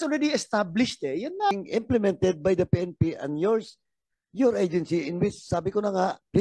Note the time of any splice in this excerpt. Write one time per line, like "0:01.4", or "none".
0:01.5